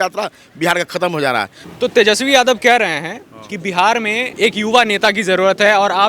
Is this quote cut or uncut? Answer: cut